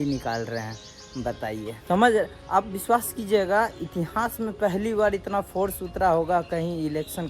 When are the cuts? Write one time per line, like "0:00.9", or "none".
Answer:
0:01.7